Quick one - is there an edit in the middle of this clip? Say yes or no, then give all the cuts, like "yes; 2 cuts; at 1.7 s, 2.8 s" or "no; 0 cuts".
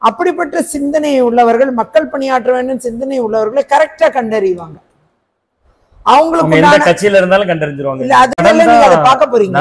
yes; 1 cut; at 8.4 s